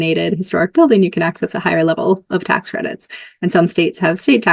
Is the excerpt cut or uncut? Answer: uncut